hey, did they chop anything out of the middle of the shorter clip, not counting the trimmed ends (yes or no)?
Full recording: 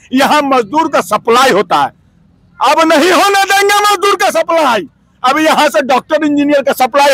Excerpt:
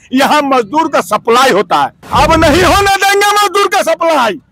yes